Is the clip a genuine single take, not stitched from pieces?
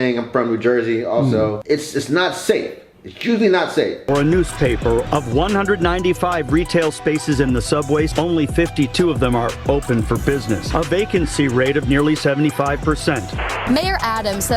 no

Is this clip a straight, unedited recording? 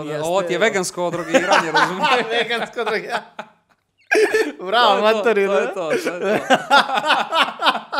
yes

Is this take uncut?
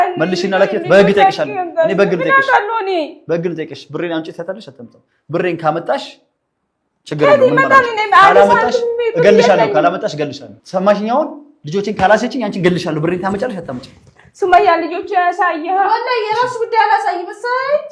yes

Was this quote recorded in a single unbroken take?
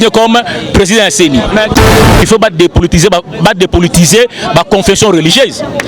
no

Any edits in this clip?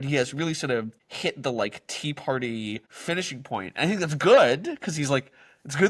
yes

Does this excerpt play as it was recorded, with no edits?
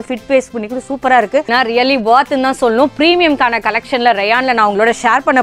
no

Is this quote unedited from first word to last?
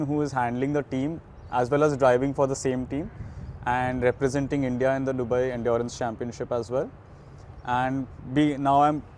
yes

